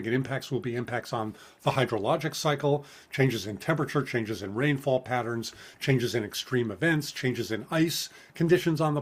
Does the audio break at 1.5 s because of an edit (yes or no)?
no